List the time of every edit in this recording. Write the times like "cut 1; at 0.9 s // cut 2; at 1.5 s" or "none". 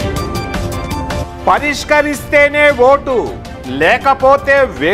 cut 1; at 1.2 s